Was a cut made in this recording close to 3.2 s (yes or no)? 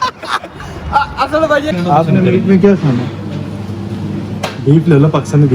no